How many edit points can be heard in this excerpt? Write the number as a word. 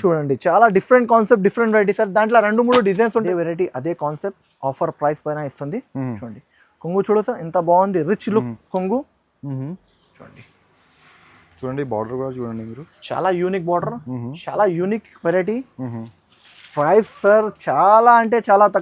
one